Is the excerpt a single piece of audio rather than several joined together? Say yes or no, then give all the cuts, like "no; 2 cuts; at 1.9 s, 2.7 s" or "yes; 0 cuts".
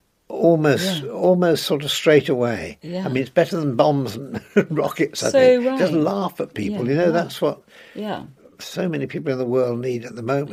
yes; 0 cuts